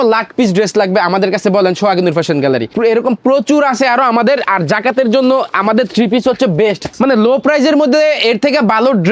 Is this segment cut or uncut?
cut